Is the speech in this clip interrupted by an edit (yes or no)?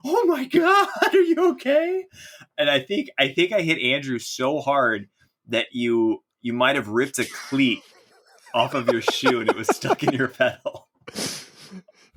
no